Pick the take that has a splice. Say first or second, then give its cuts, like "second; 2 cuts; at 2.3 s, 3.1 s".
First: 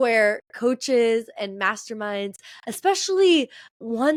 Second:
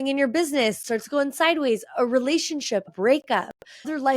second; 2 cuts; at 0.8 s, 2.9 s